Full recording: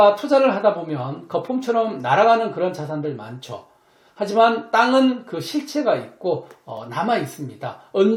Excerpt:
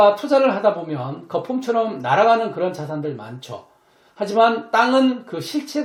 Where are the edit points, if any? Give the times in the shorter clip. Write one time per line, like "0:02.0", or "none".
none

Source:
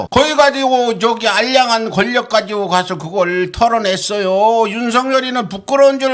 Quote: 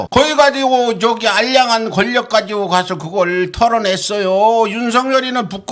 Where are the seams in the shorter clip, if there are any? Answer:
none

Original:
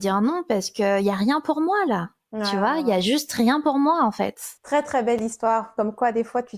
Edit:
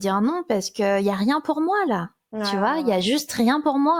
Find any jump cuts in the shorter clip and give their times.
none

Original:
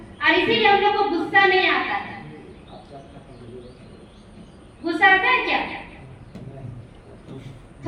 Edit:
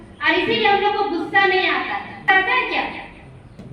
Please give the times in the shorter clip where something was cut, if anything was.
0:02.3

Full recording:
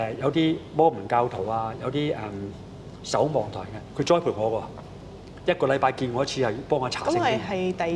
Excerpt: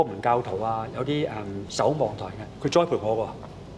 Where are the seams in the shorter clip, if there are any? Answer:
0:01.6

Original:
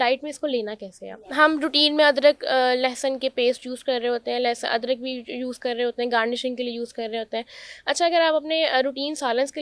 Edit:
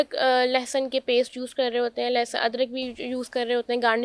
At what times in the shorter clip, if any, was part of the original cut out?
none

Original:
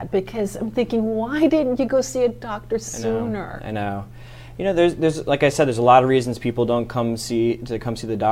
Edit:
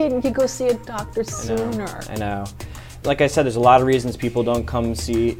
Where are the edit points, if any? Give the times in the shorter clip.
0:03.0

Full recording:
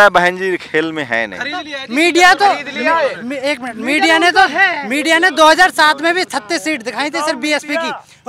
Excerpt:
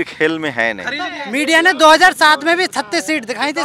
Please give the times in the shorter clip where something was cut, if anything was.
0:01.2

